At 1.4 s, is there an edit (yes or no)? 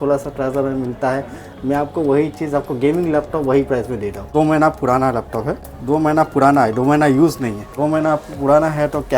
no